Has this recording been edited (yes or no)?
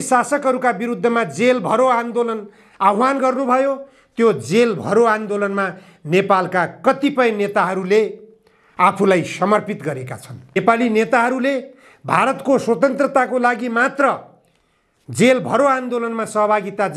yes